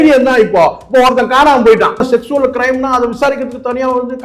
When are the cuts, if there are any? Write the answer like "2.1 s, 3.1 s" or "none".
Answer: 2.0 s